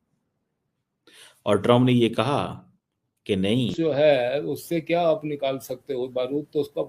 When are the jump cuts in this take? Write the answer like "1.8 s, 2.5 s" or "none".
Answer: 3.7 s

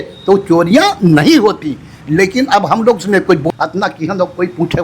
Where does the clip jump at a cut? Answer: 3.4 s

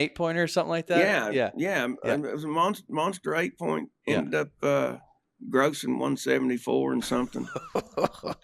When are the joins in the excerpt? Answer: none

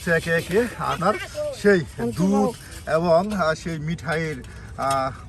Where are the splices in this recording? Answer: 1.0 s

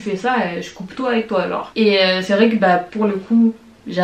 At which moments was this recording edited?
none

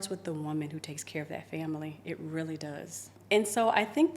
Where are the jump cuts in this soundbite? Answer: 3.1 s

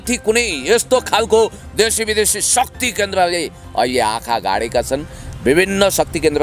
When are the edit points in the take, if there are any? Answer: none

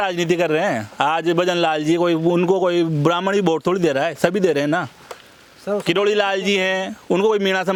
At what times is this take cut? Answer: none

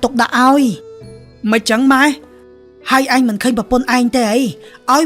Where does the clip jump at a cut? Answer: 2.4 s

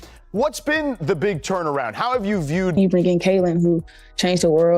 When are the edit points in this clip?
2.8 s

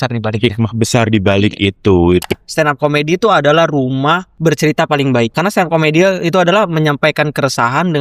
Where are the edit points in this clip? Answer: 2.3 s, 4.3 s, 5.3 s

